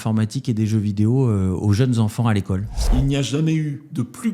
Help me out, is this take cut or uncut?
cut